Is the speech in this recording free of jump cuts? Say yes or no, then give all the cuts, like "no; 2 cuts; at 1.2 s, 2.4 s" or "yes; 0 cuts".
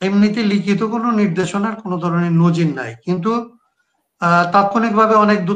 yes; 0 cuts